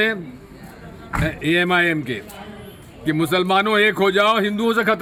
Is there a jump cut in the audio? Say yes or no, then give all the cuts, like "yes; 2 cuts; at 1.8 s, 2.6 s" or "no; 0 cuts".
no; 0 cuts